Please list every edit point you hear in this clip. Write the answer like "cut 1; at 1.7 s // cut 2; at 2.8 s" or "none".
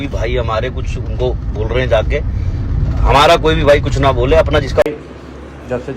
cut 1; at 4.8 s